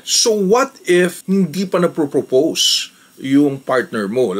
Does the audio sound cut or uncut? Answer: uncut